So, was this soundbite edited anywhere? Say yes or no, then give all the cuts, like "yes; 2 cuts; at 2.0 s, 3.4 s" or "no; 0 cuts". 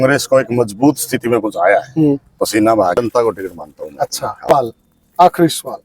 yes; 2 cuts; at 3.0 s, 4.5 s